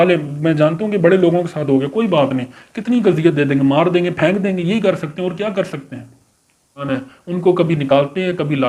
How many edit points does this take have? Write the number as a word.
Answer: one